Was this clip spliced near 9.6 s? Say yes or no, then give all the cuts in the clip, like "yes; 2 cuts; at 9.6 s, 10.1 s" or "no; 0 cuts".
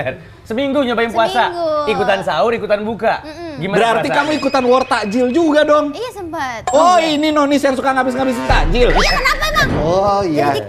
yes; 1 cut; at 9.6 s